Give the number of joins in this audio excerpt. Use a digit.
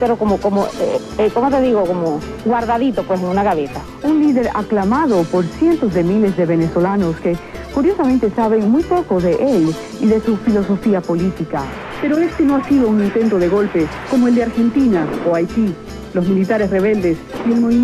1